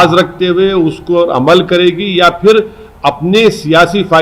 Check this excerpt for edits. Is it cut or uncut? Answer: uncut